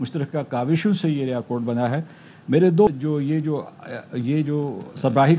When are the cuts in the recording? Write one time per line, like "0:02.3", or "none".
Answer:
0:02.9